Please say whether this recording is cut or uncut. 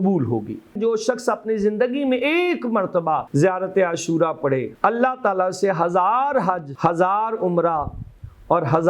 cut